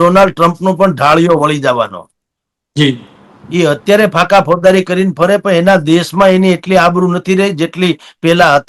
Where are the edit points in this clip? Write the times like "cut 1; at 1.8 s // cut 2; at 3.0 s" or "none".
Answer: none